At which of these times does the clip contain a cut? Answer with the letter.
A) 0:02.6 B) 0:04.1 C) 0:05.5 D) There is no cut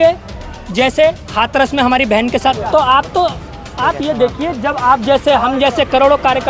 A